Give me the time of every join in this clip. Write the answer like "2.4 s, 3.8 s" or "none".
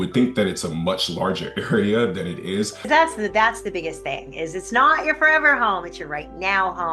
2.8 s